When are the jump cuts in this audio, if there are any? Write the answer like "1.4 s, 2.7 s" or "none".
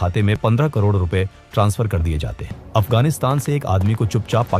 2.6 s